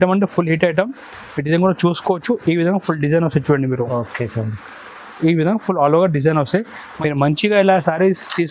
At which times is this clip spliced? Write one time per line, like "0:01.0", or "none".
0:06.8